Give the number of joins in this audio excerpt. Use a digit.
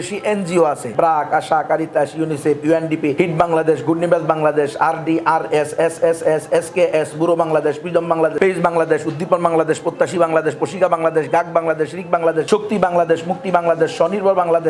4